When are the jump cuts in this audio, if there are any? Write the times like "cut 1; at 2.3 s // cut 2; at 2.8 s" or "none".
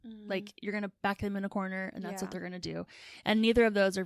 cut 1; at 0.9 s